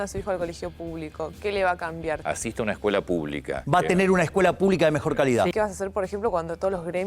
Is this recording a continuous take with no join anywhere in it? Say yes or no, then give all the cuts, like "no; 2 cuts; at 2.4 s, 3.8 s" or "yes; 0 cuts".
no; 3 cuts; at 2.2 s, 3.6 s, 5.5 s